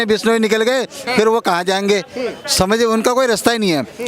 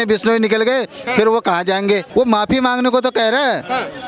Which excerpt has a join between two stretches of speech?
second; 1 cut; at 2.1 s

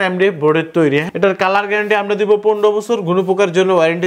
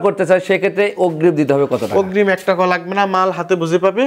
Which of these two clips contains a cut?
first; 1 cut; at 1.1 s

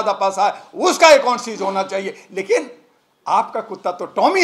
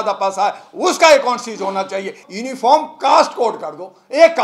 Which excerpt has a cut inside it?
second; 1 cut; at 2.3 s

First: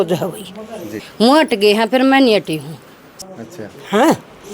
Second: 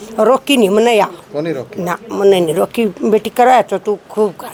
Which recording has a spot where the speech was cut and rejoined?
first; 2 cuts; at 1.0 s, 3.1 s

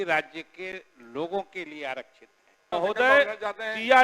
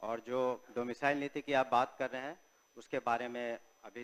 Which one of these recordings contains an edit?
first; 1 cut; at 2.7 s

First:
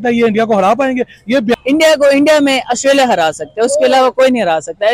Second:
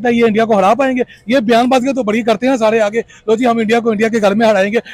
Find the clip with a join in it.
first; 1 cut; at 1.5 s

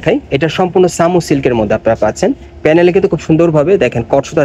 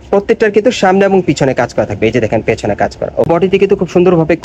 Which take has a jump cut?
second; 1 cut; at 3.3 s

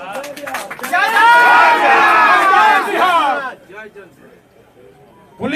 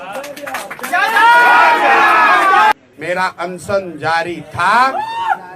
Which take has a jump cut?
second; 1 cut; at 2.7 s

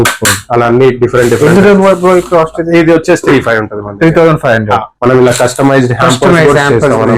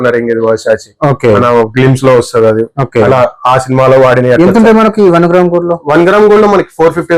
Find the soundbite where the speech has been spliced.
first; 1 cut; at 4.9 s

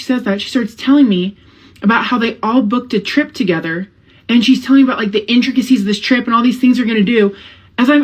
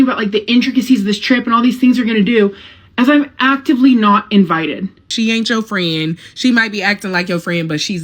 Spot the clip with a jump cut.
second; 1 cut; at 5.0 s

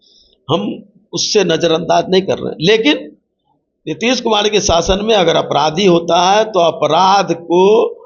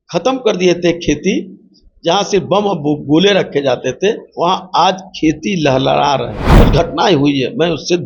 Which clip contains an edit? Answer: second; 2 cuts; at 4.3 s, 6.5 s

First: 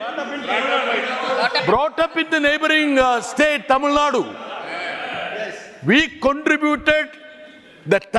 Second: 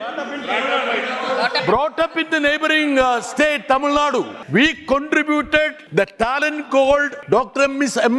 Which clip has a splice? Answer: second; 3 cuts; at 4.4 s, 5.8 s, 7.1 s

